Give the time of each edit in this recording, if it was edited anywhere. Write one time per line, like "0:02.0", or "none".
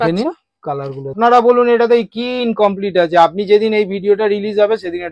0:01.2